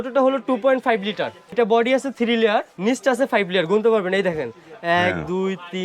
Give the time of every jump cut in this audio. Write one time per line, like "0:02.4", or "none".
0:01.5
0:02.7